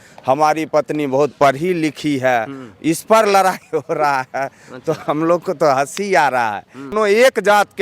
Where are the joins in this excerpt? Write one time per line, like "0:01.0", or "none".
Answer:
0:06.9